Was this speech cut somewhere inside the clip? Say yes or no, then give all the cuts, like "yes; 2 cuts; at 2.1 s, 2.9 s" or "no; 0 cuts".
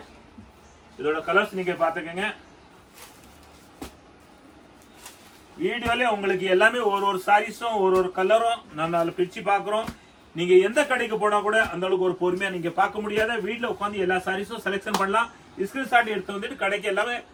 no; 0 cuts